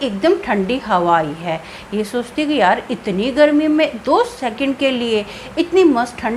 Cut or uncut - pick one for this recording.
uncut